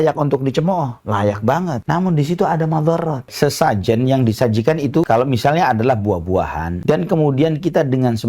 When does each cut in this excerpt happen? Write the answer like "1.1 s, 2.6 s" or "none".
1.8 s, 3.3 s, 5.1 s, 6.8 s